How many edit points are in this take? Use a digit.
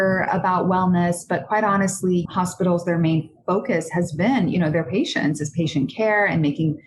1